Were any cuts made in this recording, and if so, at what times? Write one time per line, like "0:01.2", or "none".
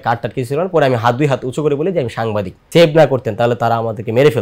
0:02.6

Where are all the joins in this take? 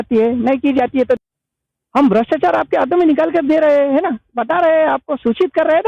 0:01.5

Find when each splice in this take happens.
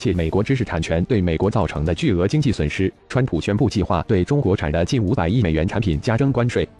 0:03.1

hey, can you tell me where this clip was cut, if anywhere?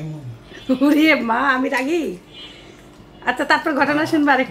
none

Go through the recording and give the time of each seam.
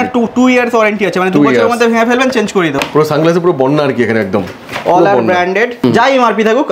0:02.7
0:05.8

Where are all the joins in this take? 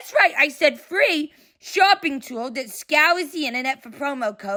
none

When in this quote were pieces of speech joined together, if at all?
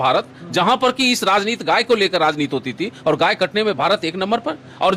none

